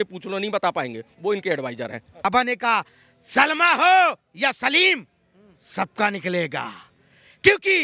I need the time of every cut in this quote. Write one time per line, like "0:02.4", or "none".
0:02.2